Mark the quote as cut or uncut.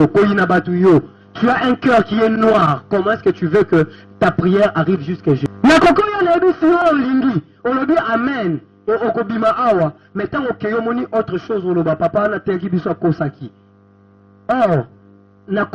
cut